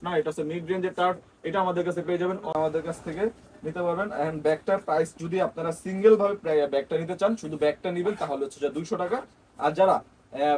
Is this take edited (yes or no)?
yes